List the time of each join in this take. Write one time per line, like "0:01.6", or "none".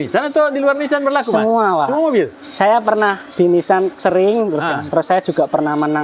none